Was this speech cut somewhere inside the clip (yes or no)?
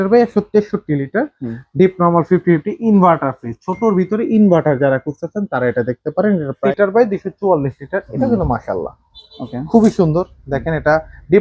yes